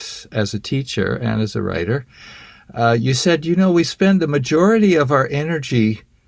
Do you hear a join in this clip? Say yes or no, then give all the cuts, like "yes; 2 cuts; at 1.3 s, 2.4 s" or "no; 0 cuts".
no; 0 cuts